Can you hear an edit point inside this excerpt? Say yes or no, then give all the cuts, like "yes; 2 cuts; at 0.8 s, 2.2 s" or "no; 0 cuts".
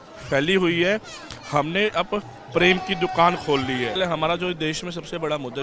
yes; 1 cut; at 4.0 s